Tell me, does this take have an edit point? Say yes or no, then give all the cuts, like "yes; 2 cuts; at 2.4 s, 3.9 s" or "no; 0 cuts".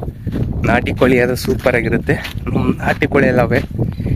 no; 0 cuts